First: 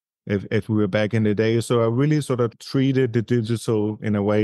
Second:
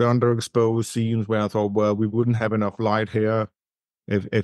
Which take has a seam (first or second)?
first